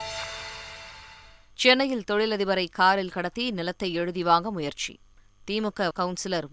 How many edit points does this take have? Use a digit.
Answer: 1